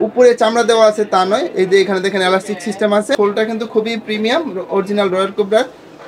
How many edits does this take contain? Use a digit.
1